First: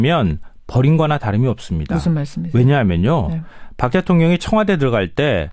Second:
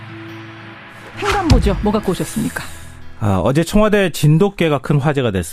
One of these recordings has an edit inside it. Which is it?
second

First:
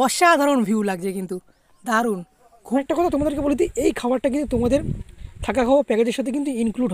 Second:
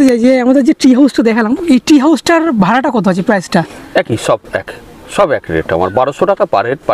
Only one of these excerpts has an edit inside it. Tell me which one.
first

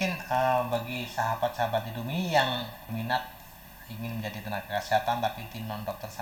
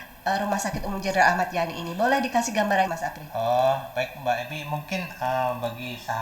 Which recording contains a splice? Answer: second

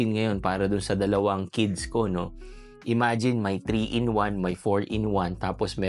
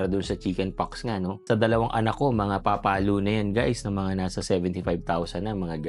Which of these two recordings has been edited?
second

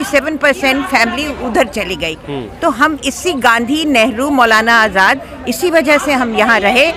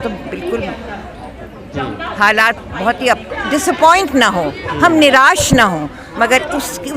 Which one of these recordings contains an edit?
second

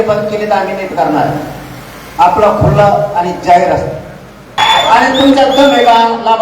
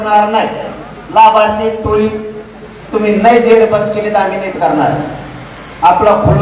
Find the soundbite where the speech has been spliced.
first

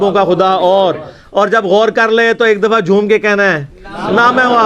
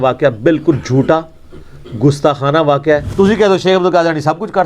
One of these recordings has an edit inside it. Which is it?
second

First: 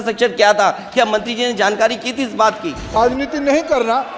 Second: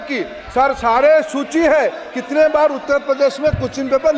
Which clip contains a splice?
first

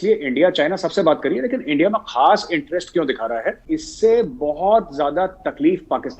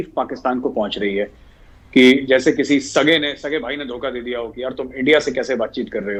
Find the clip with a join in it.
first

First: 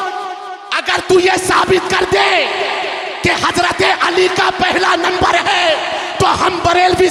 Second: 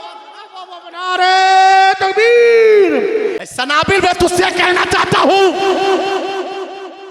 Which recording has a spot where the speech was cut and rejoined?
second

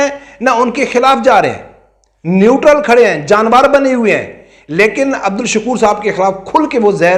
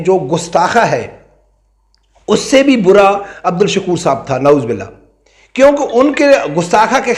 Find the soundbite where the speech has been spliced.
second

